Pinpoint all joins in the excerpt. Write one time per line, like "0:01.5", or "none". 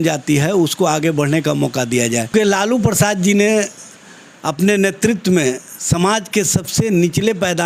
0:02.3